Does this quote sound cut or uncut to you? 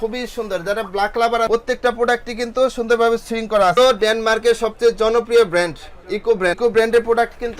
cut